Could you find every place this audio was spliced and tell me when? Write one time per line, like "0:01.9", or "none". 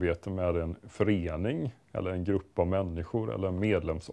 none